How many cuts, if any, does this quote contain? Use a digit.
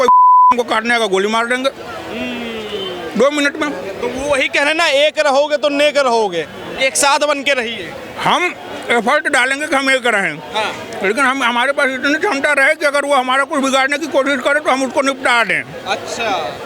0